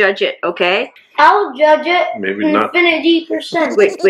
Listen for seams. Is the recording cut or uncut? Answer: cut